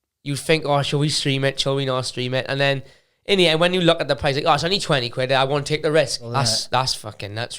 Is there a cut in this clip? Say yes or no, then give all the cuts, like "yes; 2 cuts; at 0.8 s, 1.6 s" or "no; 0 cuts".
yes; 1 cut; at 6.2 s